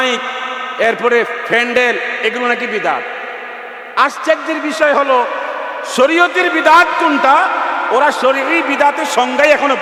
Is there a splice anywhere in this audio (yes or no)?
no